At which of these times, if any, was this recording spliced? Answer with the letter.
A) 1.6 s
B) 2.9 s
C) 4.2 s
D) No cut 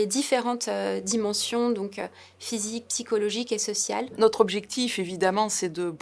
C